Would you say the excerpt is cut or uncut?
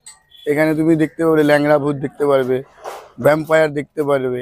uncut